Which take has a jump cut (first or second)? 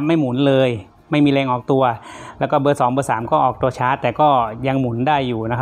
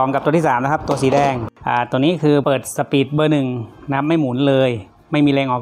second